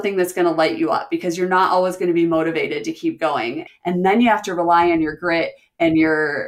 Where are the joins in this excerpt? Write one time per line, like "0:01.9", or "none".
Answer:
0:03.6